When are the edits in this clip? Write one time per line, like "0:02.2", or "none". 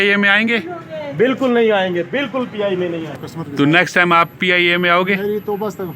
0:03.3